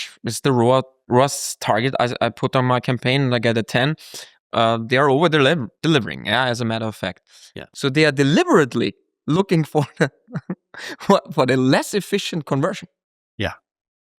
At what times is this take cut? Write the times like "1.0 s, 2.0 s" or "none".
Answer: 7.6 s

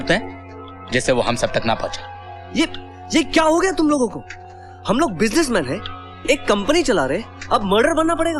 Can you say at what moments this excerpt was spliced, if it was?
none

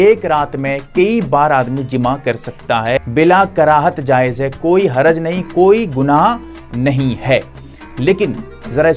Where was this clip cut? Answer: none

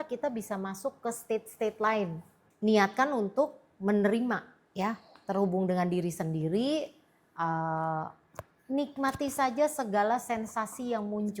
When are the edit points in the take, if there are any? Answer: 2.4 s

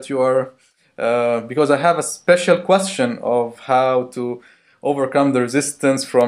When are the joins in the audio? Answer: 2.1 s

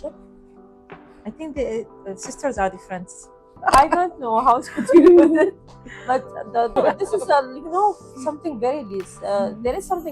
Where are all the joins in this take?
3.5 s, 6.8 s

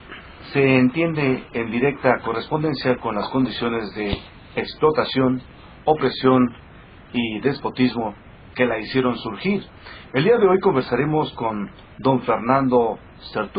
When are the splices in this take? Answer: none

